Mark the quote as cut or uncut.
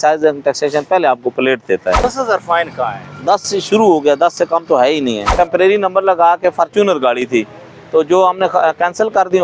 cut